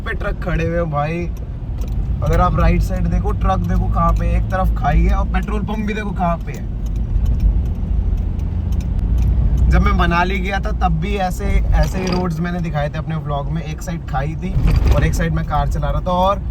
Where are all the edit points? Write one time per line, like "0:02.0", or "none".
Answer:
none